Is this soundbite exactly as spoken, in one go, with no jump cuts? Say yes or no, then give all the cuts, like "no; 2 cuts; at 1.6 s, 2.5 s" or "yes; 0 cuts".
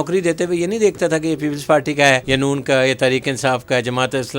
no; 1 cut; at 2.2 s